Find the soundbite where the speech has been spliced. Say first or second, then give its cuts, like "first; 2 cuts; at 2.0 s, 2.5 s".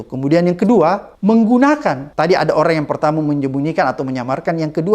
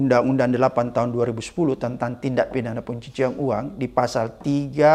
first; 2 cuts; at 1.1 s, 2.0 s